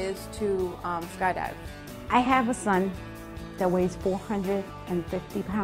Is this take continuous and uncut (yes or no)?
yes